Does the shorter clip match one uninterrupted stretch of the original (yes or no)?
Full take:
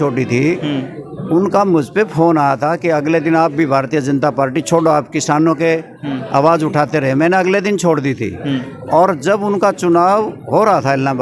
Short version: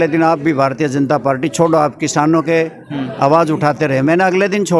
yes